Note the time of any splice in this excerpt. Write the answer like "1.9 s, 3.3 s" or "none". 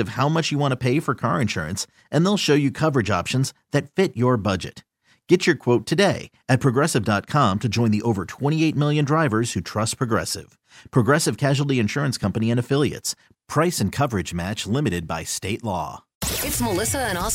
16.1 s

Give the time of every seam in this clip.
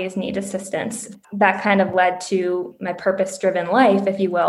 1.0 s

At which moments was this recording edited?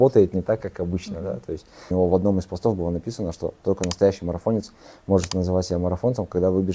1.9 s

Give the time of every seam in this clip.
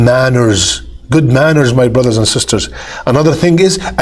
none

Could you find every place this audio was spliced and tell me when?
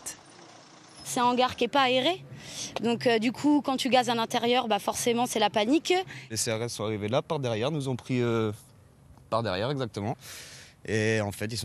1.4 s

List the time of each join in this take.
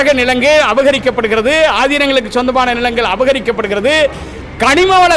none

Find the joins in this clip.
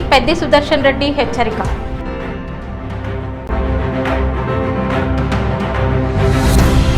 3.4 s

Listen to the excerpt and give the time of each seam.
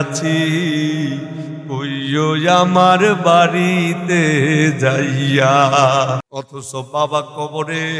6.3 s

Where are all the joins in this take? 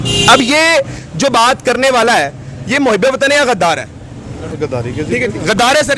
4.5 s

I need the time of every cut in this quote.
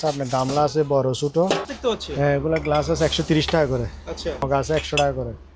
1.7 s, 4.4 s

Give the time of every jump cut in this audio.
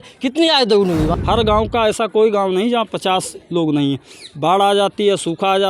1.1 s

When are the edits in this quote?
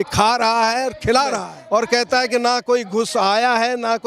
1.5 s

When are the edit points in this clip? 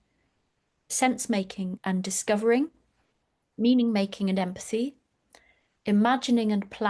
0.9 s, 1.8 s

